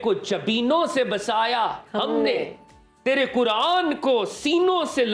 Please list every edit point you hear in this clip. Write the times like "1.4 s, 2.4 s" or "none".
none

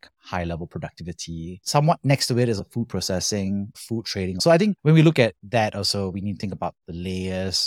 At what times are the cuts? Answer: 2.6 s, 4.4 s

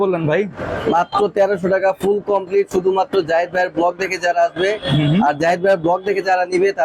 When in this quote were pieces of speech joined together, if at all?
none

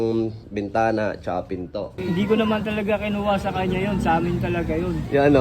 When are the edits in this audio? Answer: 2.0 s

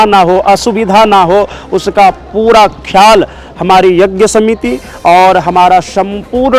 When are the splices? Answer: none

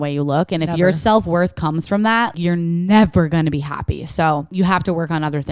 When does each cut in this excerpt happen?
2.4 s, 4.5 s

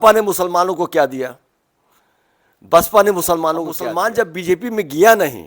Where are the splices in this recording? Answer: 3.8 s

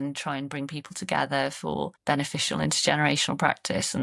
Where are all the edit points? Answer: none

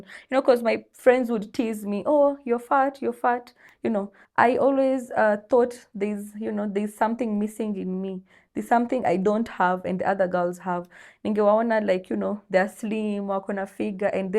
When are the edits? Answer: 4.2 s

